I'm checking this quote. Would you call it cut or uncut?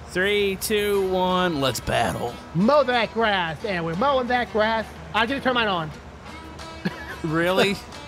uncut